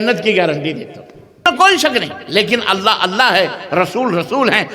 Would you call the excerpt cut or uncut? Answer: cut